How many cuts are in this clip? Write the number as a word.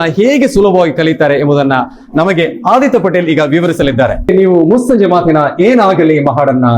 one